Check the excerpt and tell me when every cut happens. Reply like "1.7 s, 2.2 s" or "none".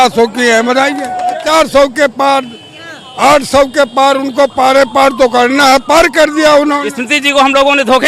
1.4 s, 6.9 s